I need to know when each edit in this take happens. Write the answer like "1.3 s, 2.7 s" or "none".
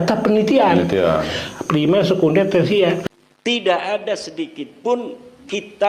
3.0 s